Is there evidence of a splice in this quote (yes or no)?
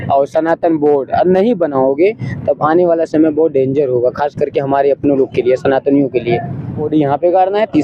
yes